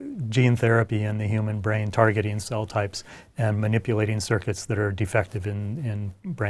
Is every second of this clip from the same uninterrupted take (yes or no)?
yes